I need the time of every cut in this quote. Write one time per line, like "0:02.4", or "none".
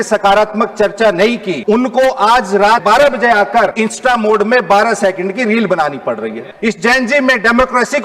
0:01.5
0:02.8
0:03.7
0:06.4